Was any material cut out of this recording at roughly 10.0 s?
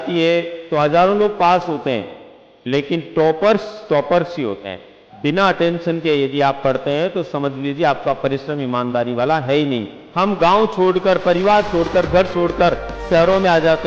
yes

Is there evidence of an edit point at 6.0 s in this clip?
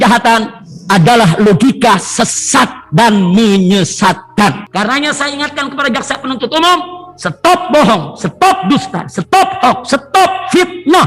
no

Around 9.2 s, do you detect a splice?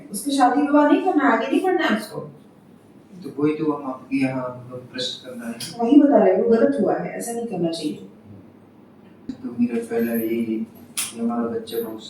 yes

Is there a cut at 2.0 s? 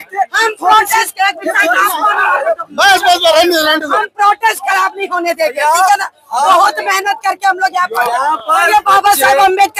no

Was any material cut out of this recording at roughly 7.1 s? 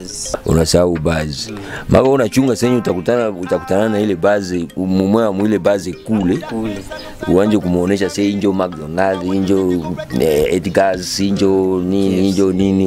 no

